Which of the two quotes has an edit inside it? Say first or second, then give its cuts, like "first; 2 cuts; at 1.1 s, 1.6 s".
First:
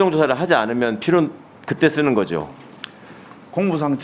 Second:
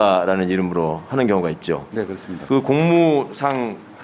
second; 1 cut; at 2.3 s